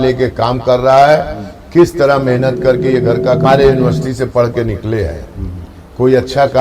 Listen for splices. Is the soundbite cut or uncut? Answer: cut